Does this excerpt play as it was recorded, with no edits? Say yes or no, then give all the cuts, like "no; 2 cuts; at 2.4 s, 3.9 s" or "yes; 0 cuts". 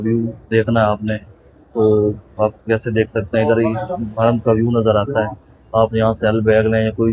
yes; 0 cuts